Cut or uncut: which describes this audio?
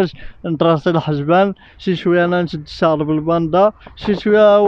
uncut